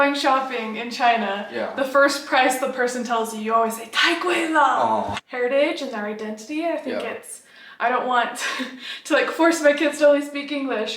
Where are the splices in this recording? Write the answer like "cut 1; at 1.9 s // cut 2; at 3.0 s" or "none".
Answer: cut 1; at 5.2 s